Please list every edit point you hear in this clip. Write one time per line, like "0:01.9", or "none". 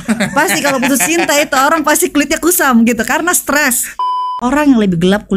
0:04.0